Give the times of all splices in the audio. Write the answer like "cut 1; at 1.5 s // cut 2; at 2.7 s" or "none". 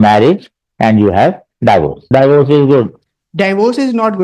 cut 1; at 2.0 s

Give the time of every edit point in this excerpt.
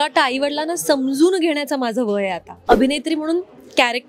cut 1; at 2.6 s

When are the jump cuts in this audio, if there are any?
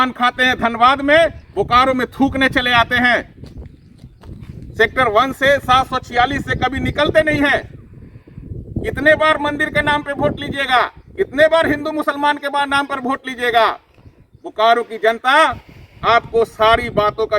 none

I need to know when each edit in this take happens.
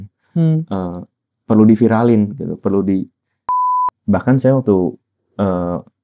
cut 1; at 3.5 s

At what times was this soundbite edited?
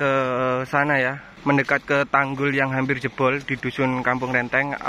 cut 1; at 1.3 s

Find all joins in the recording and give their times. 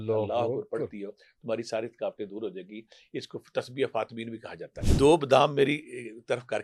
cut 1; at 4.7 s

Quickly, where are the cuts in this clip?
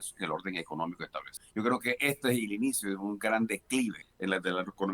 cut 1; at 1.3 s // cut 2; at 4.1 s

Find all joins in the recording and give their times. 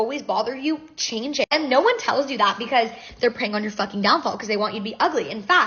none

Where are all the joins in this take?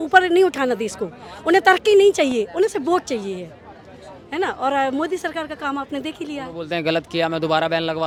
none

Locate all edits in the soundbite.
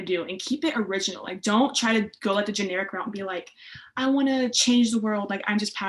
none

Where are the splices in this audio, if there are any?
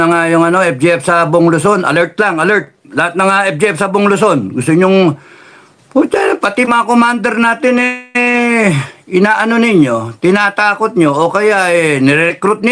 none

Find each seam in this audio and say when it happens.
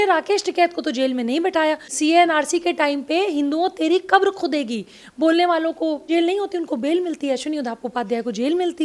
cut 1; at 1.9 s // cut 2; at 6.1 s

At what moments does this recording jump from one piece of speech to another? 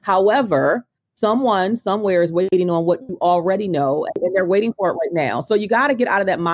cut 1; at 4.2 s

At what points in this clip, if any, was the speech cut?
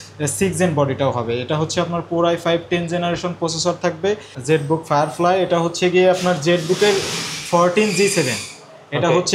cut 1; at 4.3 s

